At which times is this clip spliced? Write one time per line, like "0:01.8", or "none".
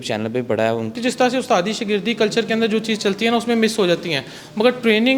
0:00.9